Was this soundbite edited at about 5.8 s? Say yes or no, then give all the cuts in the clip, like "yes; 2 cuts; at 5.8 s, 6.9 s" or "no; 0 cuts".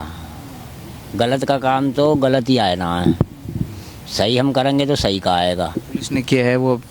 yes; 1 cut; at 5.8 s